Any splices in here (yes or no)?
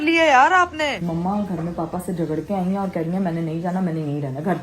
yes